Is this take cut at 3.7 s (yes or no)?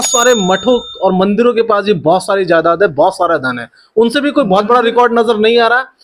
no